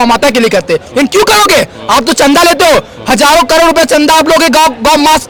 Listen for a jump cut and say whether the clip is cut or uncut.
uncut